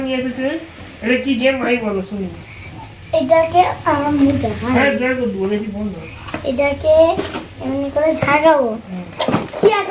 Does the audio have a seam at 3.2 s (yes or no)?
no